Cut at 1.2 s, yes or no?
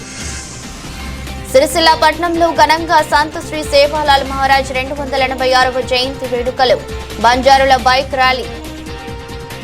yes